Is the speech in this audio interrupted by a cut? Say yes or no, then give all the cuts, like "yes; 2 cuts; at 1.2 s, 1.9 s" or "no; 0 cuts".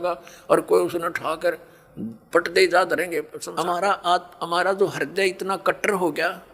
yes; 1 cut; at 3.4 s